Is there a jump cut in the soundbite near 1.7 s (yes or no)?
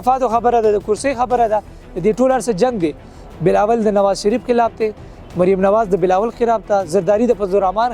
no